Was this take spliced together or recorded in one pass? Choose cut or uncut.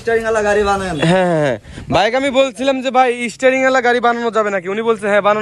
uncut